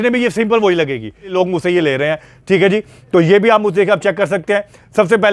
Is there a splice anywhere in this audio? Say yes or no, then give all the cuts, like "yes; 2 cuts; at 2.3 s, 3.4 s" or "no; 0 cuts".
yes; 1 cut; at 1.3 s